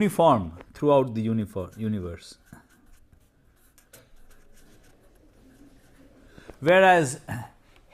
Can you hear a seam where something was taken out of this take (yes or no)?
yes